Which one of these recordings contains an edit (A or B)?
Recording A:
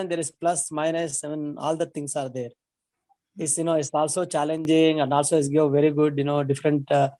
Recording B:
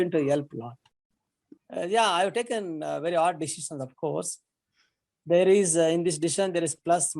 B